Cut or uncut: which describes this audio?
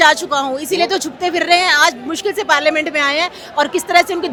uncut